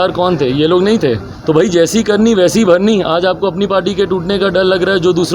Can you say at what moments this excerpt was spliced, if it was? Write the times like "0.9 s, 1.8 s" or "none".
1.3 s

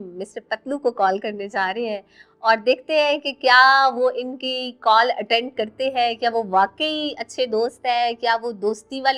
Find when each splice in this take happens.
none

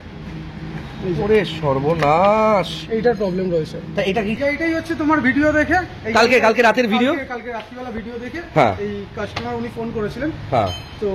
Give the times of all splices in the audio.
4.4 s

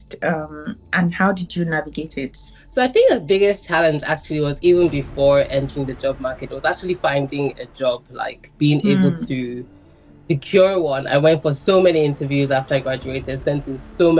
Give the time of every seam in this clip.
2.5 s

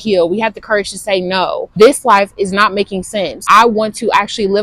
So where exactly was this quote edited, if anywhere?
1.7 s, 3.4 s

